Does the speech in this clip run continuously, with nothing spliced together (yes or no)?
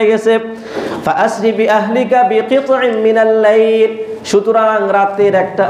yes